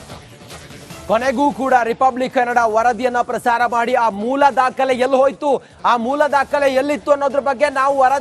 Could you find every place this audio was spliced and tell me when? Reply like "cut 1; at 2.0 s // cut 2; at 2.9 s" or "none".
cut 1; at 1.0 s